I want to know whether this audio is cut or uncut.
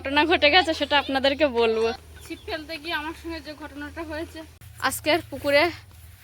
cut